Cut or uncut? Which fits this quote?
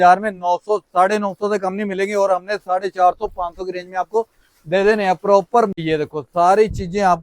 cut